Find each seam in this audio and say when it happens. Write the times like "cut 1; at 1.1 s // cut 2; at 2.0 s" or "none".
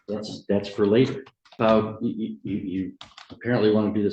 cut 1; at 1.4 s